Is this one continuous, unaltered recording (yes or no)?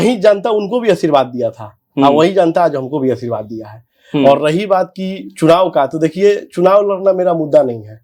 yes